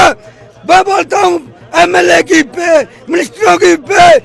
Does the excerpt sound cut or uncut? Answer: uncut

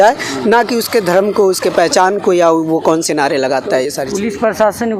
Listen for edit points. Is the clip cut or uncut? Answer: uncut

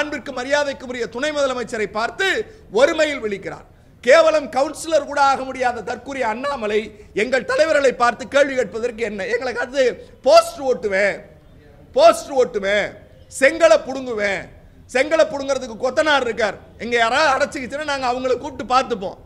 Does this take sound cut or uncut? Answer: uncut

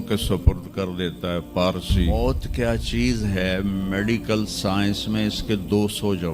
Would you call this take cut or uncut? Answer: cut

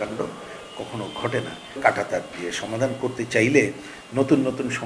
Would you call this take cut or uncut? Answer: cut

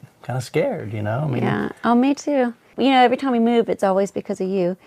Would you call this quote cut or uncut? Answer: cut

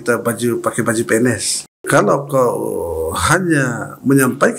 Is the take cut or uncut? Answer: cut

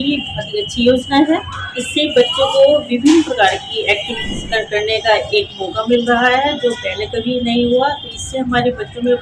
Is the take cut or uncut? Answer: uncut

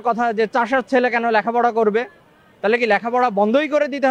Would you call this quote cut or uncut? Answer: uncut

